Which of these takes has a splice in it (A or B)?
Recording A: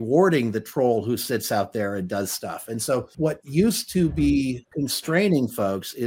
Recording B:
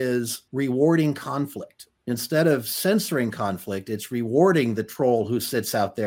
A